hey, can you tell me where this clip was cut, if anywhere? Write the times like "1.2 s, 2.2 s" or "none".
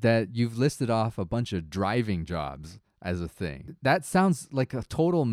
3.5 s